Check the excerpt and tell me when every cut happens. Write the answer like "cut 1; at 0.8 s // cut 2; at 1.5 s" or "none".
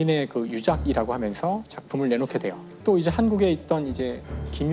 cut 1; at 2.8 s